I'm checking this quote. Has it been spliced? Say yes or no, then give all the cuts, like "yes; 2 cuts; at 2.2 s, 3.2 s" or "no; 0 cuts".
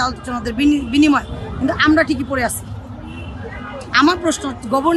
no; 0 cuts